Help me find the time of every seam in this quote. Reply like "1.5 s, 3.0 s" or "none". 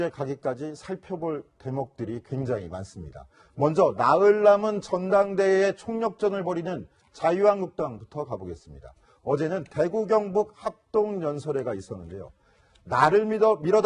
none